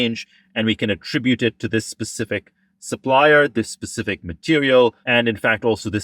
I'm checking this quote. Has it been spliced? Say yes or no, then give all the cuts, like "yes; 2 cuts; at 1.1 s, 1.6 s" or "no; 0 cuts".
yes; 1 cut; at 5.0 s